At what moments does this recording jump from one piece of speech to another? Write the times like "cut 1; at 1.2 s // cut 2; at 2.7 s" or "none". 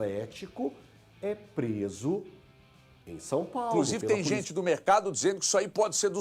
cut 1; at 3.9 s